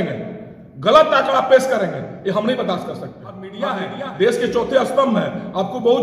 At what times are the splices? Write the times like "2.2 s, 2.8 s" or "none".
3.5 s

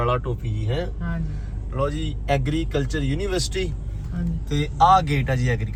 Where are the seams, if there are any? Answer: none

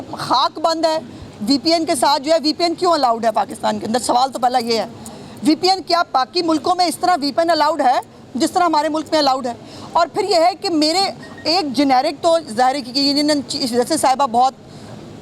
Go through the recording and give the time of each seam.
none

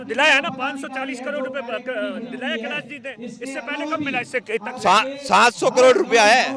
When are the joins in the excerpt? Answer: none

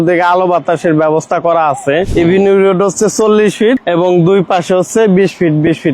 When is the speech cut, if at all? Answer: 2.1 s, 3.8 s

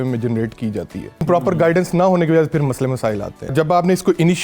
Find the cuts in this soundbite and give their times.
1.2 s, 3.5 s

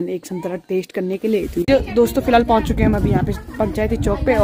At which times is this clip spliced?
1.7 s

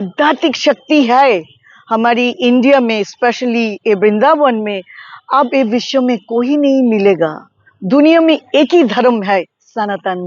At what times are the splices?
none

